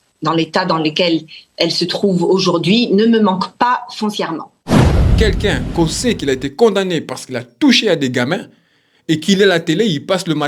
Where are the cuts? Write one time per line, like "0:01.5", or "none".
0:04.5
0:05.2